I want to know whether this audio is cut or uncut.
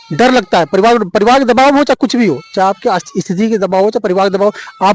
uncut